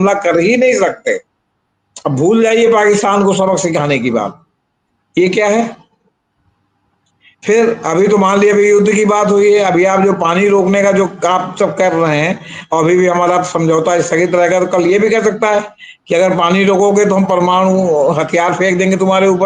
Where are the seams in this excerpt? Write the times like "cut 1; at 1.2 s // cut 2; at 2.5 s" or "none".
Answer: none